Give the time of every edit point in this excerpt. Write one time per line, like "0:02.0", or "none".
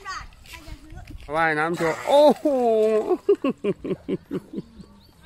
0:01.3